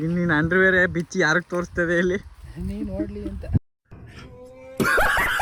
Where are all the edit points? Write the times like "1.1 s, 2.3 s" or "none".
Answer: none